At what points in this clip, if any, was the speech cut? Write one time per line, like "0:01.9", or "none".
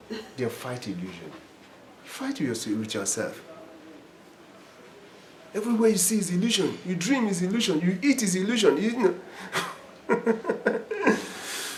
none